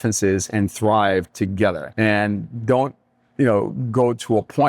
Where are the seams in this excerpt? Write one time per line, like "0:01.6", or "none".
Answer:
0:01.8